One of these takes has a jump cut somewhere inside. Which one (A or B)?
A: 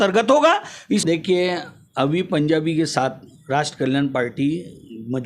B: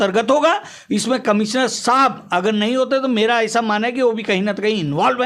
A